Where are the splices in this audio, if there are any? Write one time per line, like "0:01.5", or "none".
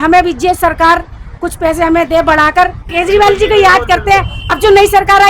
0:02.9